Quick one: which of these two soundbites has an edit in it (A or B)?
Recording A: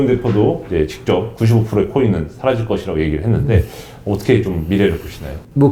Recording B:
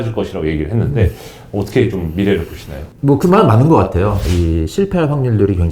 B